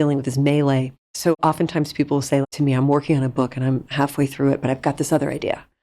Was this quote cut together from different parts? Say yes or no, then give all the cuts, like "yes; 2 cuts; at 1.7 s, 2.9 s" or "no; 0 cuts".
yes; 2 cuts; at 1.4 s, 2.4 s